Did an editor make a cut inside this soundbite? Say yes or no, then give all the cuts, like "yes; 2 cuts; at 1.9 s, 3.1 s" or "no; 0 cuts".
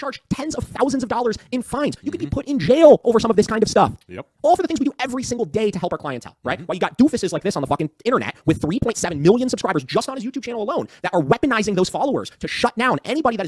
no; 0 cuts